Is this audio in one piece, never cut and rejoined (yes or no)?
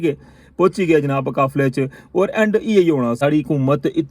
no